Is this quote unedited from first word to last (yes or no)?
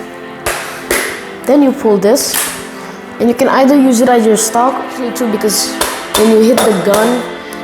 no